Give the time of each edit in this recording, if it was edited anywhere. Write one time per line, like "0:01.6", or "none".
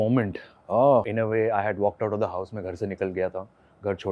0:01.1